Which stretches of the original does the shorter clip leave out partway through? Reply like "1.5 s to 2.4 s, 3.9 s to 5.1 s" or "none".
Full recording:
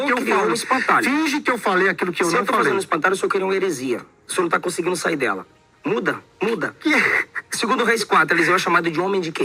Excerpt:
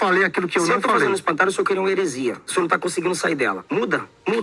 4.1 s to 4.2 s, 5.4 s to 5.8 s